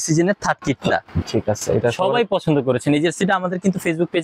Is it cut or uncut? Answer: cut